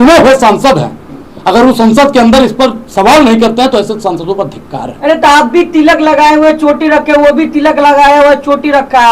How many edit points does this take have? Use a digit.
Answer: 0